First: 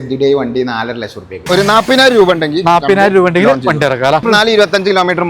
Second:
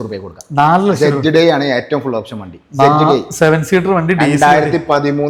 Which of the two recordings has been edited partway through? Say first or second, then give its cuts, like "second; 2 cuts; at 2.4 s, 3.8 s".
first; 2 cuts; at 1.3 s, 4.2 s